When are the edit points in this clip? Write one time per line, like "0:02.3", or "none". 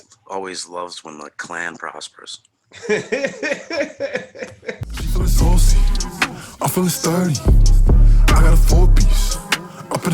0:04.9